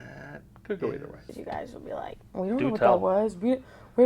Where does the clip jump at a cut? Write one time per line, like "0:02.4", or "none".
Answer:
0:01.3

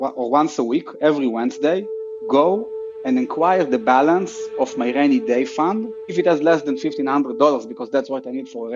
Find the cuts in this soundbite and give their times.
none

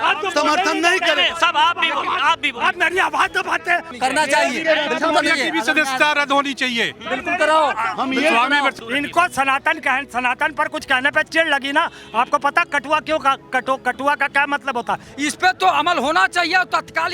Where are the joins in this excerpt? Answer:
0:03.9
0:08.7
0:15.1

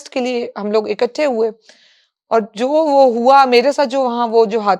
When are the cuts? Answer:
none

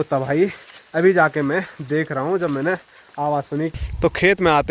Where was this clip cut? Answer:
0:03.7

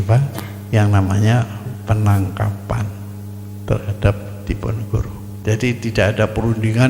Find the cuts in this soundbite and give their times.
0:05.3

